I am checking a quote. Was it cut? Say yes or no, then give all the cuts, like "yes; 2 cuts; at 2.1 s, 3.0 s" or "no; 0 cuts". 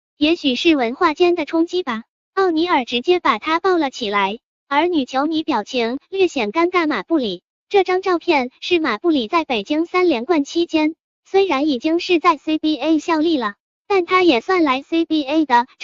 yes; 1 cut; at 14.4 s